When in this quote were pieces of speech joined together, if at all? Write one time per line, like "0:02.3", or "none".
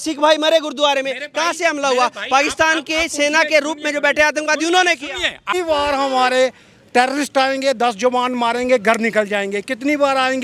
0:05.5